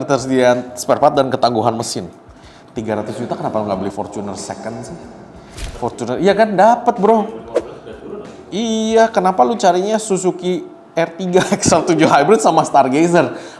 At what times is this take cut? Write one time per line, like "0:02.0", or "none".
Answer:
none